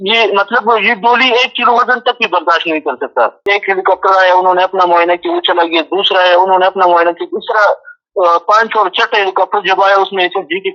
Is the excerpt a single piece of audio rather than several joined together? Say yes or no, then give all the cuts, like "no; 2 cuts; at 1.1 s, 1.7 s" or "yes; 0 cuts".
no; 1 cut; at 3.4 s